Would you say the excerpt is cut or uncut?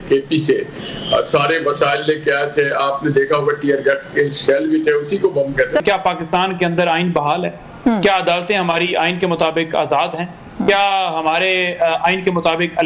cut